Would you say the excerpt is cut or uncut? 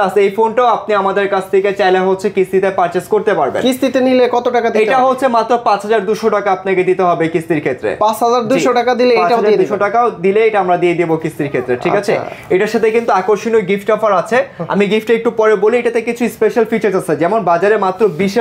uncut